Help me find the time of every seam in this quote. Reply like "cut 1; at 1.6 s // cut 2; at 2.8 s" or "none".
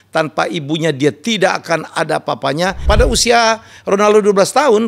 cut 1; at 2.8 s